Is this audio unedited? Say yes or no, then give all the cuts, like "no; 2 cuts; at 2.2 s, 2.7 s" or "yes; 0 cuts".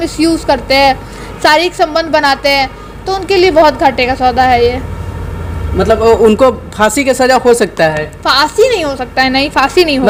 yes; 0 cuts